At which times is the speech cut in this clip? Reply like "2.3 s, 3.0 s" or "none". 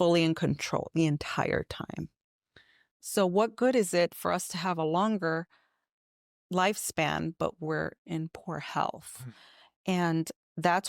3.0 s